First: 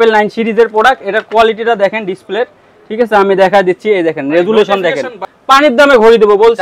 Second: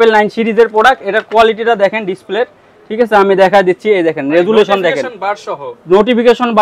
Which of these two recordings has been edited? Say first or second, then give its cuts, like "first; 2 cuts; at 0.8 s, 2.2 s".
first; 1 cut; at 5.3 s